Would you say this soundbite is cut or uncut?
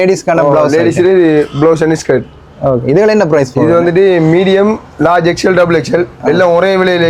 uncut